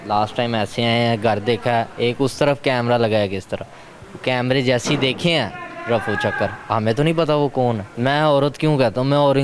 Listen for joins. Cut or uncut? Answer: cut